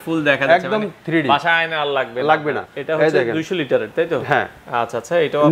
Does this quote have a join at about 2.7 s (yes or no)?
yes